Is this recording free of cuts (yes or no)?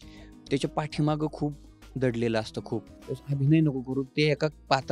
no